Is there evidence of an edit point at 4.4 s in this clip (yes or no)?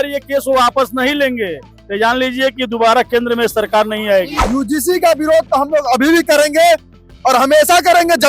yes